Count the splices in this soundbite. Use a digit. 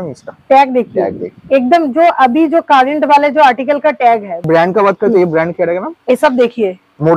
1